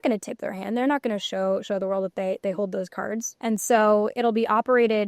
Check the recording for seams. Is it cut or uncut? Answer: cut